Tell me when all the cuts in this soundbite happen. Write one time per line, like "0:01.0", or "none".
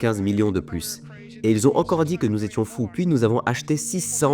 0:02.9